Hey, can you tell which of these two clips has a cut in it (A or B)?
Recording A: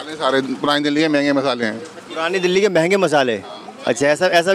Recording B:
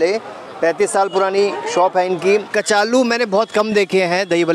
B